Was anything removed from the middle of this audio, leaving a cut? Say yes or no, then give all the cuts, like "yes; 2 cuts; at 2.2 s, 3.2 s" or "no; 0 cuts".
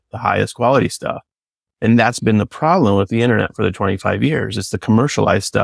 no; 0 cuts